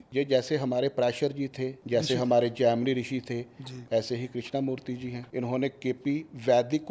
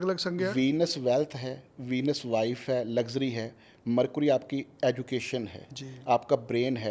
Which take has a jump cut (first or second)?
first